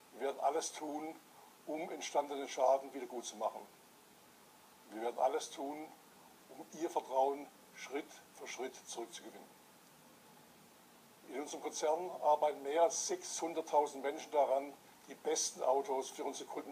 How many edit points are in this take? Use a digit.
0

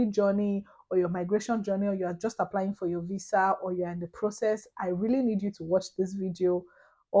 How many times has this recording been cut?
0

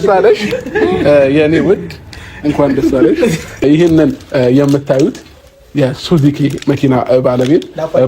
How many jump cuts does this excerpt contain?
1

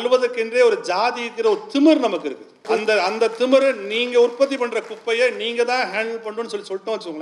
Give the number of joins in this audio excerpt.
1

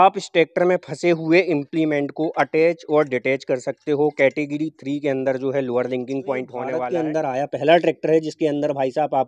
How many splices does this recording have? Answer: 1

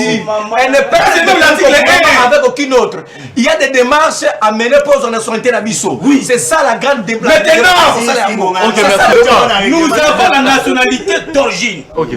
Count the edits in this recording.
1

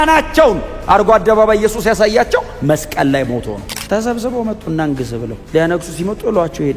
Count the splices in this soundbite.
1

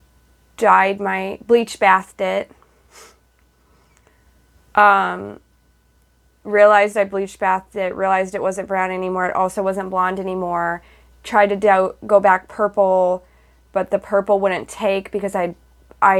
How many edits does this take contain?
0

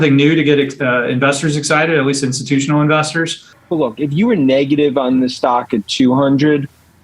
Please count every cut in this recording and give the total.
1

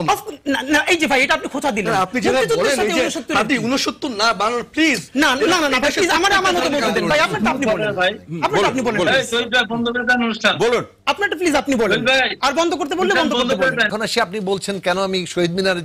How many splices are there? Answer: 1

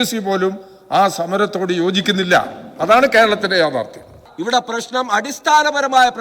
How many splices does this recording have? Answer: 1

